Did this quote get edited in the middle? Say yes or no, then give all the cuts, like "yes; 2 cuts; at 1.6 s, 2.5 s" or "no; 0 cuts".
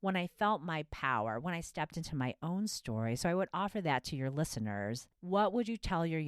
yes; 1 cut; at 5.1 s